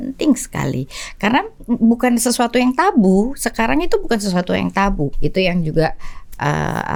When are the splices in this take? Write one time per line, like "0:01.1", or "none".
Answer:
none